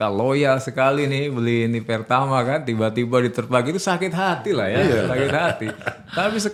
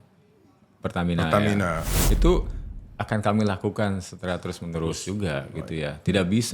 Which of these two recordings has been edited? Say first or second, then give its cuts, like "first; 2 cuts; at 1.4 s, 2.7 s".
second; 1 cut; at 2.0 s